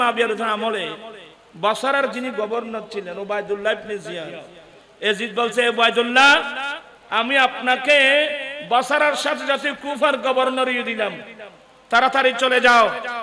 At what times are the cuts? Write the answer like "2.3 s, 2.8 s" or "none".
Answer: none